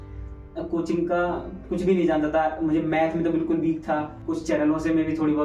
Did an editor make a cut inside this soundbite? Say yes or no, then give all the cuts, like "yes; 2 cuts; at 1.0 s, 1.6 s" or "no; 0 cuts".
yes; 1 cut; at 4.2 s